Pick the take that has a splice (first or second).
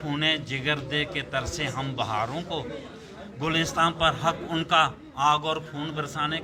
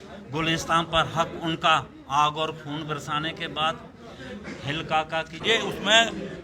second